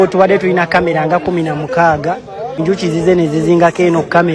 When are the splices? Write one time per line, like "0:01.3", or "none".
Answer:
0:02.6

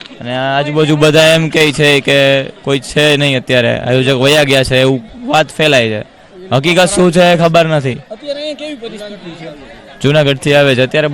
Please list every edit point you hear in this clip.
0:09.0

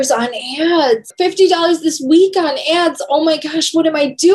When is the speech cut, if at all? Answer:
0:01.1

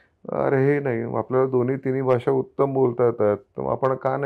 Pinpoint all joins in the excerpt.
none

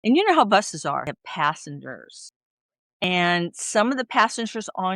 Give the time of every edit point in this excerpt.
0:01.0
0:03.0

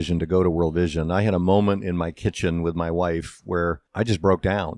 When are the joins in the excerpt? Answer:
0:03.9

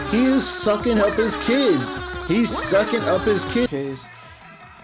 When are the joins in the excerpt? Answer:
0:03.7

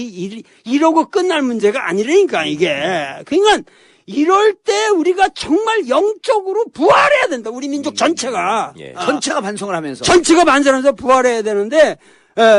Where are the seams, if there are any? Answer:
none

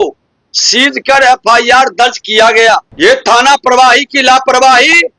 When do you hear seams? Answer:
0:02.9

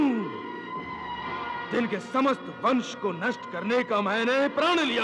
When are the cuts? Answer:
0:01.5

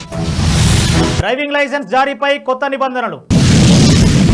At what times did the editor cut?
none

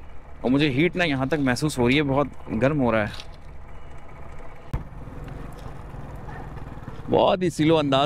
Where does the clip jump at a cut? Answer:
0:04.7

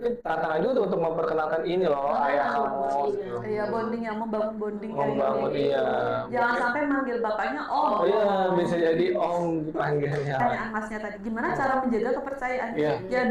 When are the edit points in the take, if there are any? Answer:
0:10.4

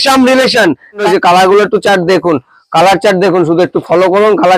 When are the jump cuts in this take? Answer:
0:01.0

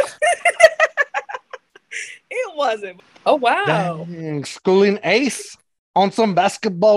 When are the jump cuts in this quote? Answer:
0:02.9

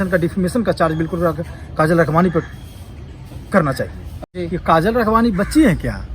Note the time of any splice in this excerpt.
0:04.3

